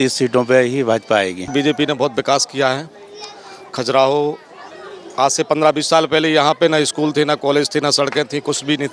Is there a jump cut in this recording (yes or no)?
yes